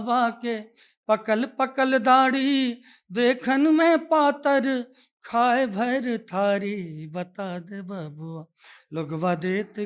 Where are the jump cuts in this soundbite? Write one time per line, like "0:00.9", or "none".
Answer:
none